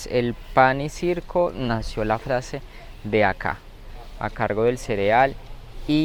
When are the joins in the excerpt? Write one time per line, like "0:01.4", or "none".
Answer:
none